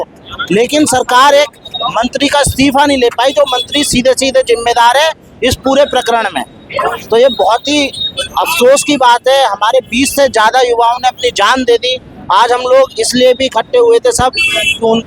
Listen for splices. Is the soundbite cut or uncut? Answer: uncut